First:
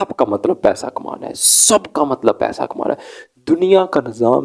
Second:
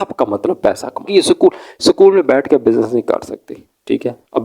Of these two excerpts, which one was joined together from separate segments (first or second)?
second